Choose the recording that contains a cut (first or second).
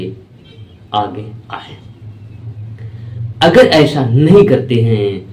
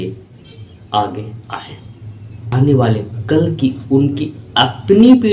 second